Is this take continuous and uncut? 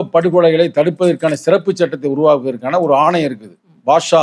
yes; 0 cuts

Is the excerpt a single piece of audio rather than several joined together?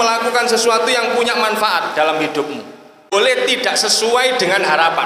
no; 1 cut; at 3.1 s

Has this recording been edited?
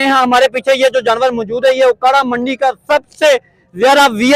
no; 0 cuts

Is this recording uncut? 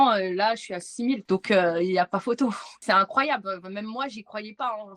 no; 1 cut; at 1.2 s

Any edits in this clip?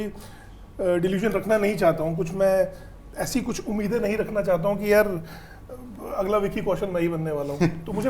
no; 0 cuts

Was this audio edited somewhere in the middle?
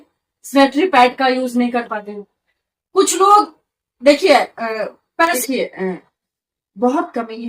yes; 1 cut; at 5.4 s

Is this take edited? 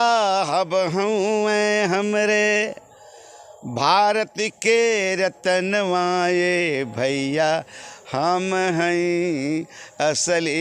no; 0 cuts

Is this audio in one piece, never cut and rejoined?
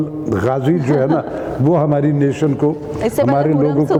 yes; 0 cuts

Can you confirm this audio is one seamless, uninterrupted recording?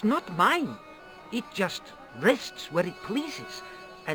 yes; 0 cuts

